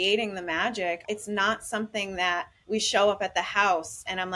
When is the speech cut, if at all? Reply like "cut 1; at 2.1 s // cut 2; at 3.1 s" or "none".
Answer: cut 1; at 1.0 s // cut 2; at 2.5 s